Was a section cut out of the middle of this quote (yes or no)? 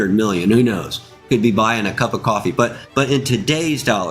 yes